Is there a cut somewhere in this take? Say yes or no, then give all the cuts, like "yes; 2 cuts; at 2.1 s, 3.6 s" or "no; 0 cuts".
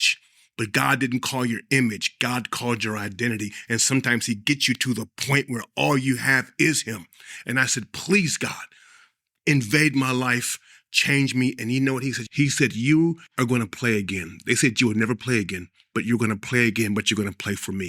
yes; 2 cuts; at 12.2 s, 13.3 s